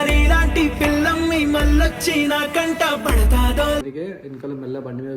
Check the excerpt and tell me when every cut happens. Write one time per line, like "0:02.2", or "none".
0:03.8